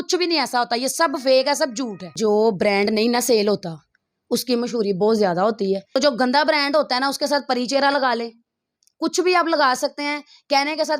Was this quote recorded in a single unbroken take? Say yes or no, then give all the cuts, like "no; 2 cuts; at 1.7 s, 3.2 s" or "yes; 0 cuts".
no; 2 cuts; at 2.2 s, 5.9 s